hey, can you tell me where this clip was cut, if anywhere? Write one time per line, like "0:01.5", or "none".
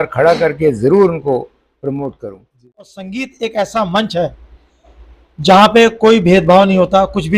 0:02.7